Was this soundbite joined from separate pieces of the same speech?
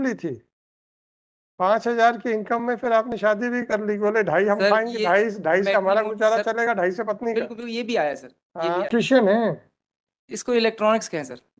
yes; 1 cut; at 8.9 s

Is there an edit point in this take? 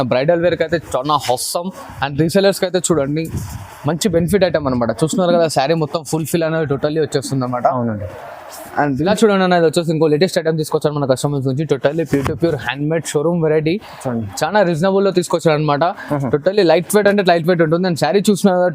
yes; 1 cut; at 9.1 s

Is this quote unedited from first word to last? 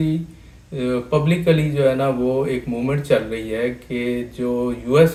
yes; 0 cuts

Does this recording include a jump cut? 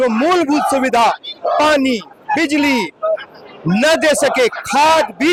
no; 0 cuts

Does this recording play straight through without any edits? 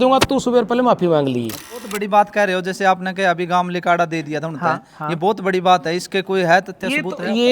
no; 1 cut; at 1.9 s

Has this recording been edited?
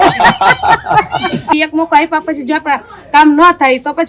yes; 1 cut; at 1.5 s

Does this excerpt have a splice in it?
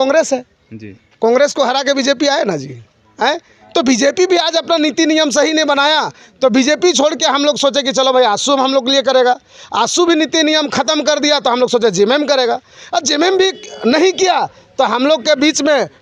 no; 0 cuts

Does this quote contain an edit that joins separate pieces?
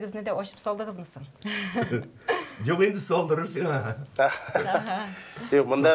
no; 0 cuts

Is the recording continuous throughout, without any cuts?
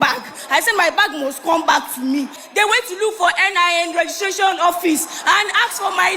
no; 1 cut; at 2.4 s

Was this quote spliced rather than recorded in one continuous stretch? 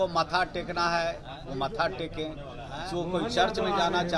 no; 0 cuts

